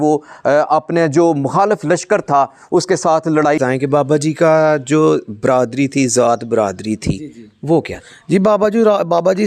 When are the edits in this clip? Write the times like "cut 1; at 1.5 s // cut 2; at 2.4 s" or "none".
cut 1; at 3.6 s